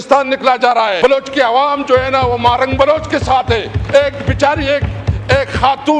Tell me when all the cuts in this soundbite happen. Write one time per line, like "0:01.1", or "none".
0:01.0